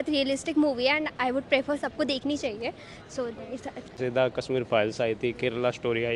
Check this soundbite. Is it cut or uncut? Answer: cut